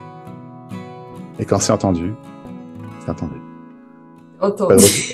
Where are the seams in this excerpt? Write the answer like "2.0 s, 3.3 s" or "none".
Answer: none